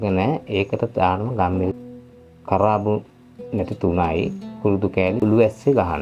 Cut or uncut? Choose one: cut